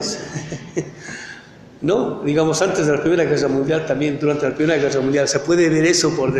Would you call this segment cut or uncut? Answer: uncut